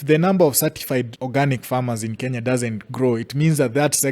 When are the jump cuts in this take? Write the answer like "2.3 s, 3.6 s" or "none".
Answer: 1.2 s